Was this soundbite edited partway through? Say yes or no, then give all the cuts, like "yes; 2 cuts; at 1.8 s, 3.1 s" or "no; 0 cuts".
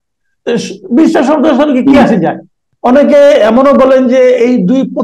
yes; 1 cut; at 2.6 s